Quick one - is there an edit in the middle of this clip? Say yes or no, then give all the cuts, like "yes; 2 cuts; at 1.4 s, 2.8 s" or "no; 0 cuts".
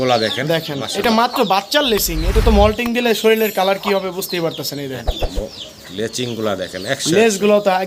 no; 0 cuts